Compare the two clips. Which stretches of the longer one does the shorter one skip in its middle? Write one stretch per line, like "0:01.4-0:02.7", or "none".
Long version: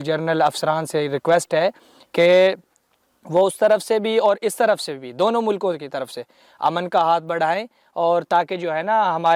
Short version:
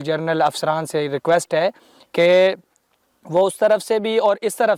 none